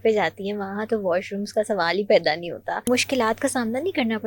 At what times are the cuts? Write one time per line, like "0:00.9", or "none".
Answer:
0:02.9